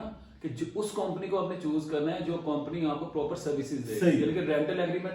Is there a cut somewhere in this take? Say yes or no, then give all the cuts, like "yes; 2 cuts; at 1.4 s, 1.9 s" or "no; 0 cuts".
no; 0 cuts